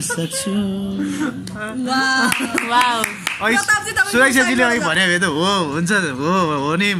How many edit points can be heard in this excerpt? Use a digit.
0